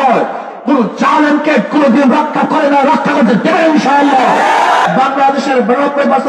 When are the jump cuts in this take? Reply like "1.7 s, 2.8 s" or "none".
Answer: 4.8 s